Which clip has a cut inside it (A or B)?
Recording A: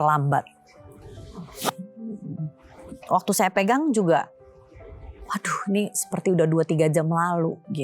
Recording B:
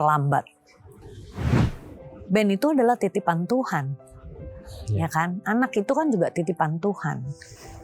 B